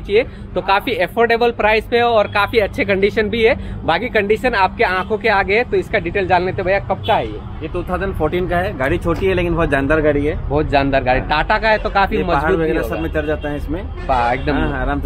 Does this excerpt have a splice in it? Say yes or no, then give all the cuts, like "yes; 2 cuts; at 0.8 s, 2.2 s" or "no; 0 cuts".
no; 0 cuts